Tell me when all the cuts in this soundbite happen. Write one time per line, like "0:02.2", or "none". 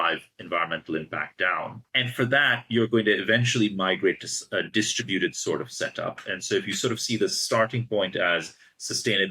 0:01.8